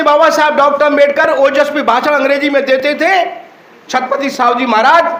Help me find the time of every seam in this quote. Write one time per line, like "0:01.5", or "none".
none